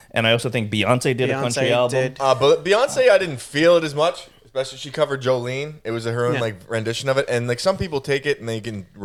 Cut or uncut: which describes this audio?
uncut